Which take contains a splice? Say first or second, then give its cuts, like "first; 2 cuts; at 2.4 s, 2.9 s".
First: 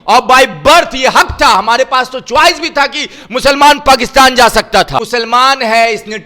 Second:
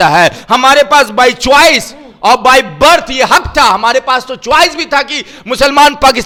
first; 1 cut; at 5.0 s